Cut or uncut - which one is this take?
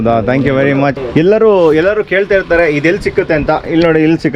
cut